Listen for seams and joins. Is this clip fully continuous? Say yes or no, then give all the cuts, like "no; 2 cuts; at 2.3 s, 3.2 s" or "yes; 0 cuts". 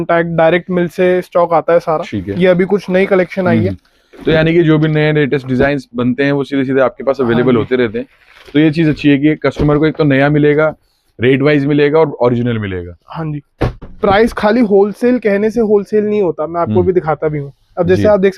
no; 1 cut; at 13.9 s